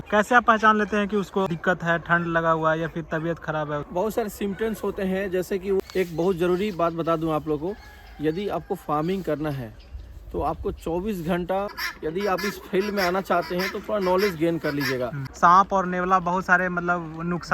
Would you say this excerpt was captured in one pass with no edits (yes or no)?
no